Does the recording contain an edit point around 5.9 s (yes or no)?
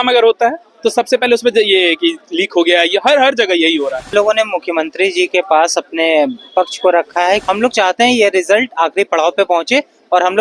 no